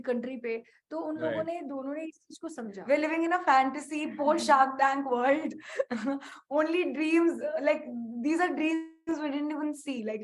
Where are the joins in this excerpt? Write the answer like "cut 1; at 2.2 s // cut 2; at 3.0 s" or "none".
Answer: cut 1; at 2.7 s